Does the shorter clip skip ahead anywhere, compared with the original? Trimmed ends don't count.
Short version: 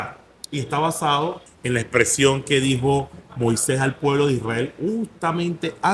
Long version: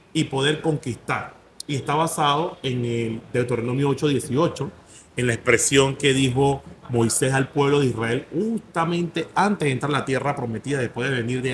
yes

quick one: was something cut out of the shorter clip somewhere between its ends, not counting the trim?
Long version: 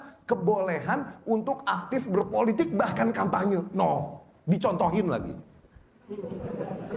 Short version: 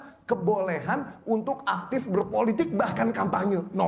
no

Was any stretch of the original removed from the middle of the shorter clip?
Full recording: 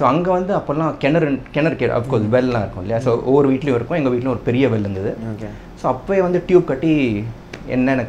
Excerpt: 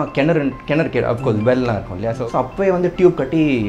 yes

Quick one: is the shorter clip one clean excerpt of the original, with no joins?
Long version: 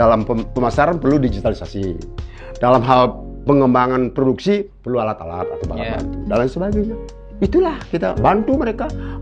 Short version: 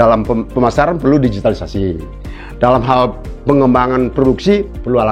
yes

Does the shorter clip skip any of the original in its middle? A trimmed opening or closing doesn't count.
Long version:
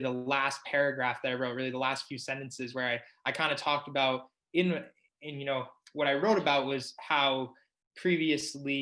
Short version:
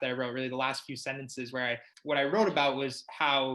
yes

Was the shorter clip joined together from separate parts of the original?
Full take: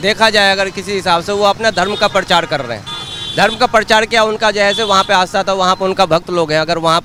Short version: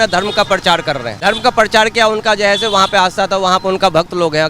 yes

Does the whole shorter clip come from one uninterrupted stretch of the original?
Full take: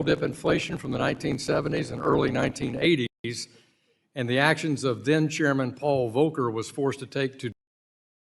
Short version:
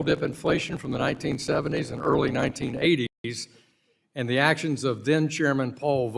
yes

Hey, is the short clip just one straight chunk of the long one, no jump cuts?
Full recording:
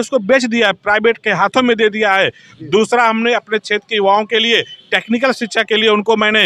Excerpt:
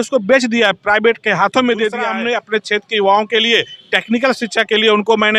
no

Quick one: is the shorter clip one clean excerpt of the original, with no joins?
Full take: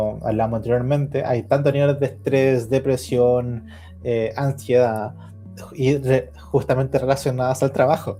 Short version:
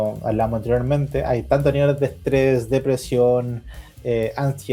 yes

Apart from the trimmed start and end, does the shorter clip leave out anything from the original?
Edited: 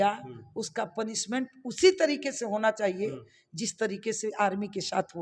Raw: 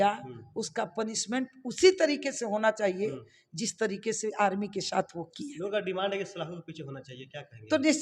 no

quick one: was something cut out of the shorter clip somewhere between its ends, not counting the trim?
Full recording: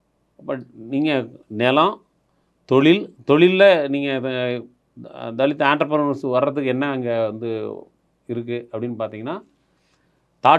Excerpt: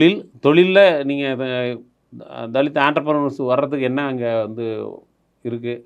no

